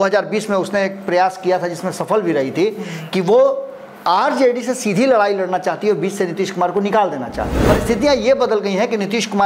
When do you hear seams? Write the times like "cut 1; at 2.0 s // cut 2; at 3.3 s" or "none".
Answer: cut 1; at 7.6 s

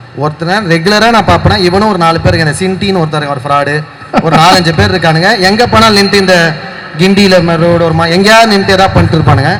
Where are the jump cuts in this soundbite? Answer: none

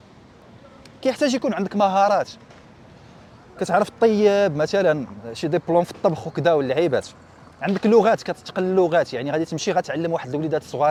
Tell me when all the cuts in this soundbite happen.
none

